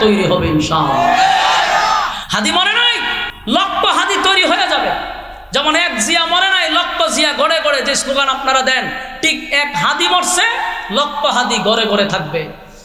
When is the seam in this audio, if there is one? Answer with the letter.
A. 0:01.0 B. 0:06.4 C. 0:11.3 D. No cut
D